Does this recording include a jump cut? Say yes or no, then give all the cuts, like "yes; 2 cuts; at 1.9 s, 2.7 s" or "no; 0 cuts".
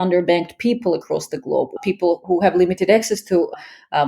yes; 1 cut; at 1.7 s